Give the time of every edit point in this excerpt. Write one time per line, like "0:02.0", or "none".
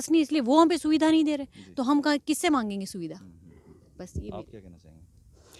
none